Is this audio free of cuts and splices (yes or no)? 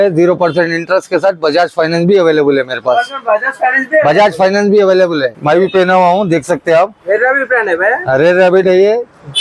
no